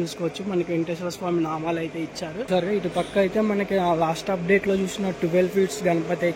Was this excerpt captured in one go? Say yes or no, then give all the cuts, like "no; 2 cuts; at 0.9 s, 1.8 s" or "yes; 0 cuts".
no; 1 cut; at 2.5 s